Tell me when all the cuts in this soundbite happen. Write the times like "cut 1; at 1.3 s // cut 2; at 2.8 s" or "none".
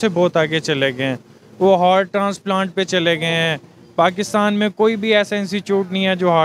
none